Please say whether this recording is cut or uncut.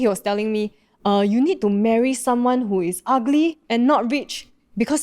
cut